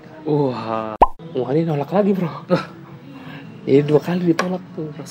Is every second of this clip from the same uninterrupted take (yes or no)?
no